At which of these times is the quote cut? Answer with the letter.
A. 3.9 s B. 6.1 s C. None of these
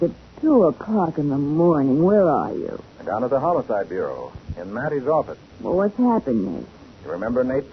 B